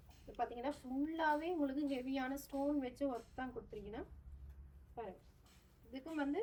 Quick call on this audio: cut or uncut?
uncut